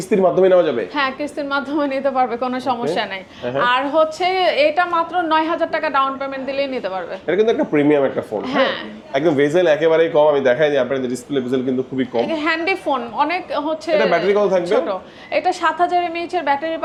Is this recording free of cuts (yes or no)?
yes